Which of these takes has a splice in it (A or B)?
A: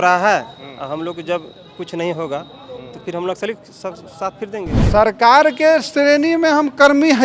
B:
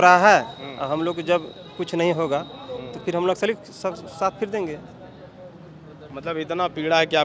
A